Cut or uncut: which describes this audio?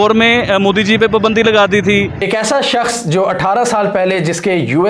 cut